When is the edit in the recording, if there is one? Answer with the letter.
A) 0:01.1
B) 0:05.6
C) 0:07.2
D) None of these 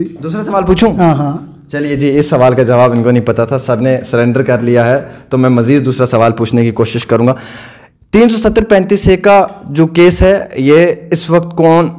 C